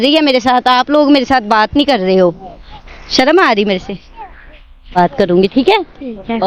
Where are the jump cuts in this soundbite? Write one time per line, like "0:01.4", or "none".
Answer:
0:05.0